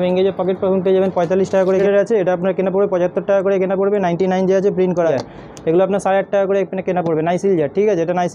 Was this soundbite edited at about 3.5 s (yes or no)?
no